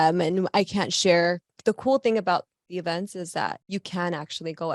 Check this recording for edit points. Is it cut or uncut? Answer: cut